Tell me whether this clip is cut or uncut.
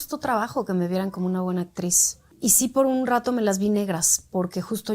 cut